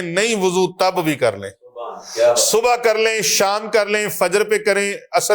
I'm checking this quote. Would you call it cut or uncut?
uncut